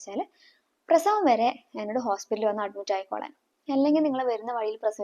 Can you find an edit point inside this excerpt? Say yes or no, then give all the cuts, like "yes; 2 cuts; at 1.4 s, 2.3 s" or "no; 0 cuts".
no; 0 cuts